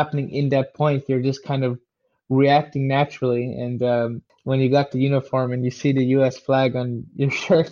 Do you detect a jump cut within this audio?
yes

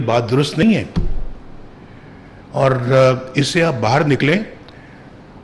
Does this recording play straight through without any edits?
yes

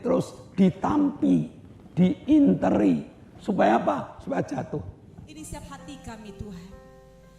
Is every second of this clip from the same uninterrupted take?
no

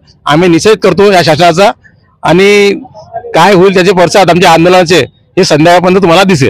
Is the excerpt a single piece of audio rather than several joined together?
yes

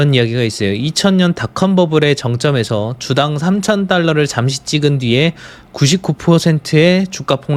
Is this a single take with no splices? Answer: yes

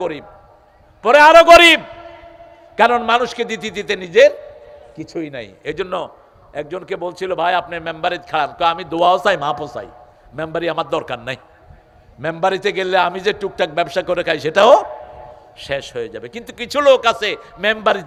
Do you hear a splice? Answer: no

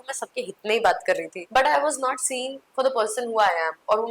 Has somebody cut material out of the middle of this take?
yes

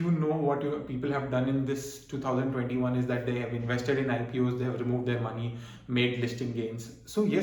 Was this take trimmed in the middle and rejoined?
no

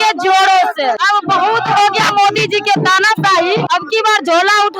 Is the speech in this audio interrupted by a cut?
yes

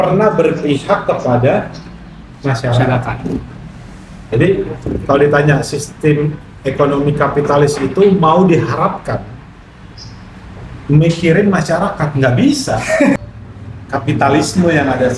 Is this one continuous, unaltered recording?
no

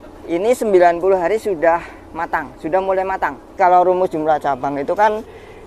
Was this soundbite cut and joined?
yes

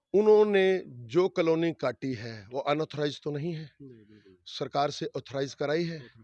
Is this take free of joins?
yes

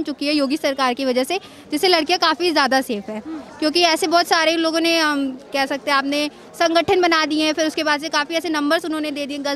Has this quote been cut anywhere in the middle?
no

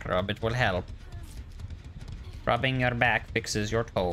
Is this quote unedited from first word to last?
yes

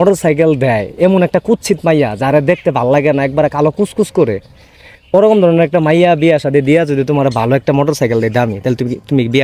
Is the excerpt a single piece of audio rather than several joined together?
yes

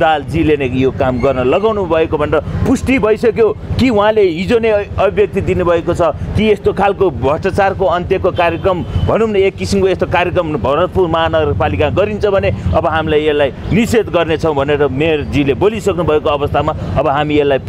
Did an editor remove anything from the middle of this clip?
no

